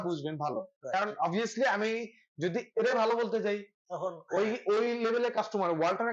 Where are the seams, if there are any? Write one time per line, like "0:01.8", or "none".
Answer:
none